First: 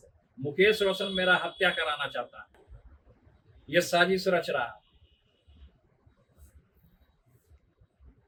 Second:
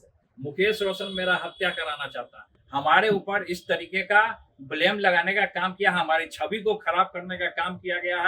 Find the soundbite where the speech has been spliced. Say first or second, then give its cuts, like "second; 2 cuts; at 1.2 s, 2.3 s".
second; 1 cut; at 2.5 s